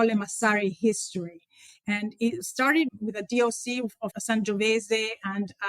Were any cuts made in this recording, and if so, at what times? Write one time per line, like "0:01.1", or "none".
0:02.9
0:04.1

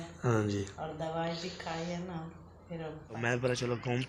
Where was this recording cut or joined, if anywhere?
0:03.1

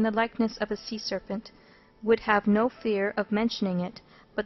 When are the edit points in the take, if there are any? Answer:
0:02.4

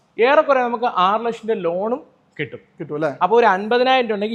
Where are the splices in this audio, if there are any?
none

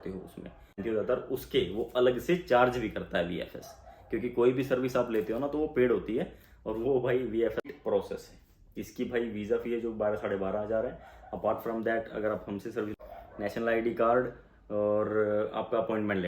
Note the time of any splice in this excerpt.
0:00.8
0:07.7
0:12.9

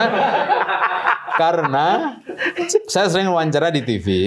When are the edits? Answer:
none

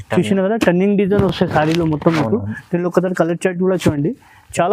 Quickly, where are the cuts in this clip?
none

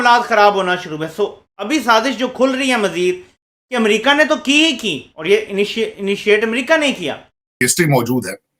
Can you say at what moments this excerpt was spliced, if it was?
0:07.5

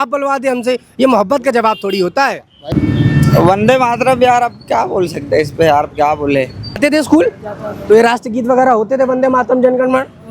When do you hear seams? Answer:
0:02.7
0:06.8

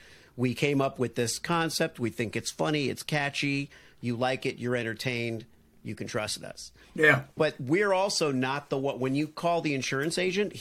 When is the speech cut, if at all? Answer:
none

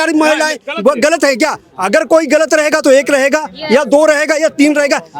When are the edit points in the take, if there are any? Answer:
none

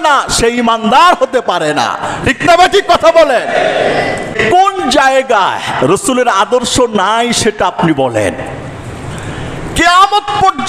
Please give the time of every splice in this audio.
0:04.4

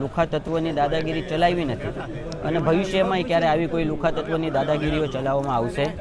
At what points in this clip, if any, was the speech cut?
none

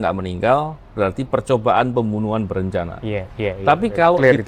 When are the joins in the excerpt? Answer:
none

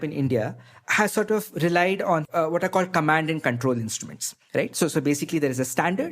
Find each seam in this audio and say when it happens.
0:02.3

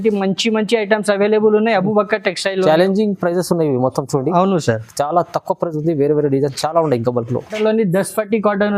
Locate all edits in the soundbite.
0:07.5

